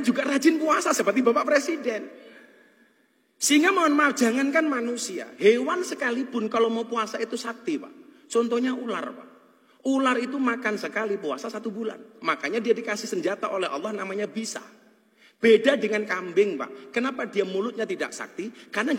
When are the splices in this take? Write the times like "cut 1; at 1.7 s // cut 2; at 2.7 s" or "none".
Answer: none